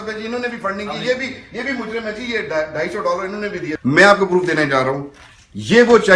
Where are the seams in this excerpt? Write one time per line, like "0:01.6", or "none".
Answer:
0:03.7